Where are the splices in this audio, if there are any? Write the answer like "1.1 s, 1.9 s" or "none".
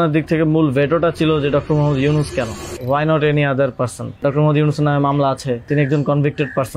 2.7 s, 4.2 s, 5.7 s

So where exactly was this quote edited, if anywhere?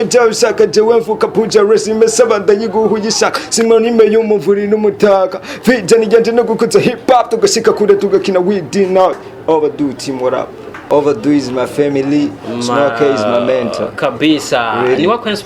10.8 s

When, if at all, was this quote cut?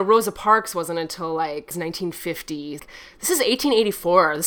1.7 s, 2.8 s

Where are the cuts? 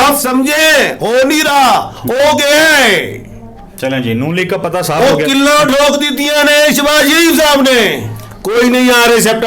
8.4 s

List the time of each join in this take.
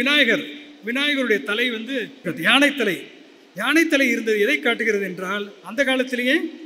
2.2 s

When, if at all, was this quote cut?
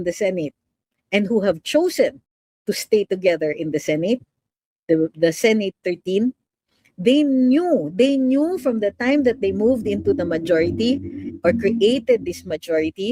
none

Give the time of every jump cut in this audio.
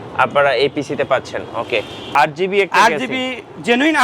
2.1 s

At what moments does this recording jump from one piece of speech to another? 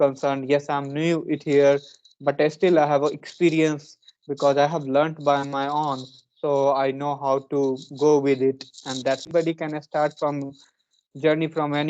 9.2 s

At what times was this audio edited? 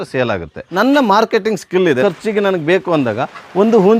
2.0 s

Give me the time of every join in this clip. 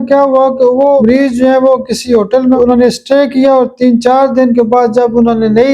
none

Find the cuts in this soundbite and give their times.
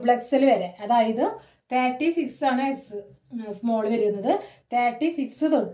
none

